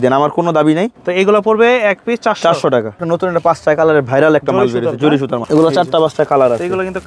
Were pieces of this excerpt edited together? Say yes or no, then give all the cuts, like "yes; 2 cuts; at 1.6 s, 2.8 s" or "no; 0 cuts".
yes; 3 cuts; at 1.0 s, 3.0 s, 5.4 s